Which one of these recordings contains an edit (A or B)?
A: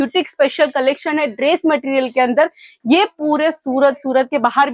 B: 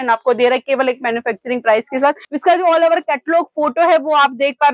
B